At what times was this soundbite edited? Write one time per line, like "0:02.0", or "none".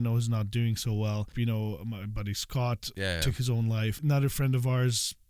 0:01.3
0:02.9
0:04.0